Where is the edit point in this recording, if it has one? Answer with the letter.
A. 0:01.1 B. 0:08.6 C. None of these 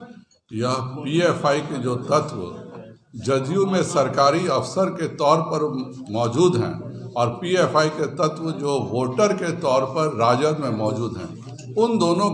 C